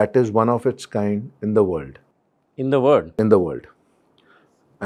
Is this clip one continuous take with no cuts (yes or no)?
yes